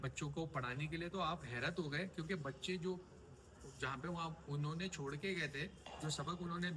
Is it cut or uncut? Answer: uncut